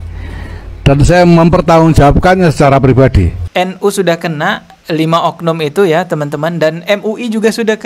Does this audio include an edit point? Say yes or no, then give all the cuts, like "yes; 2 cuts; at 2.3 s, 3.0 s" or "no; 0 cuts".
yes; 1 cut; at 3.4 s